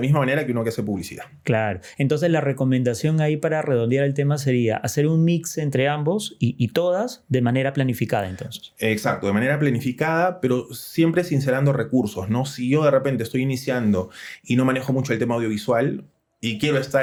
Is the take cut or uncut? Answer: uncut